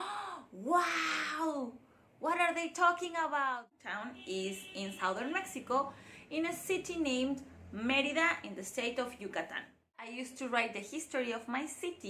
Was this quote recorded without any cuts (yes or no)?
no